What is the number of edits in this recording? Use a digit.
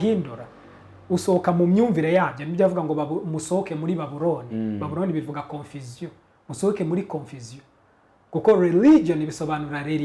0